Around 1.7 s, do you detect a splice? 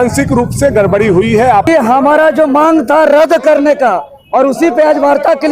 yes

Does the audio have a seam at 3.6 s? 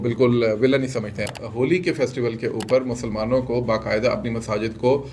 no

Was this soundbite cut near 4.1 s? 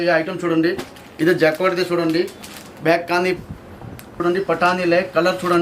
yes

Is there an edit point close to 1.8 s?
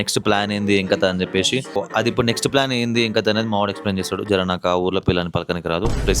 yes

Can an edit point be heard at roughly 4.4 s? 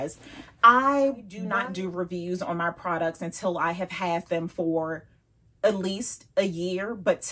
no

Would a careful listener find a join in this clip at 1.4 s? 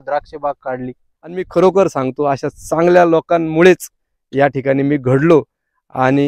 yes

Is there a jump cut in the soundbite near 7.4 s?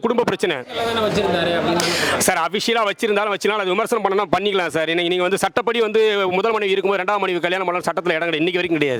no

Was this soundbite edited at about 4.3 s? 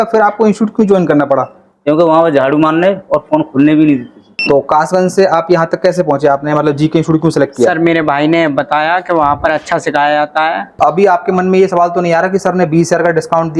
yes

